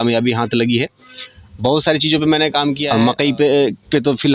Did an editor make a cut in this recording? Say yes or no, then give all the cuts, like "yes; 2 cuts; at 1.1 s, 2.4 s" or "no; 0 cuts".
yes; 1 cut; at 2.8 s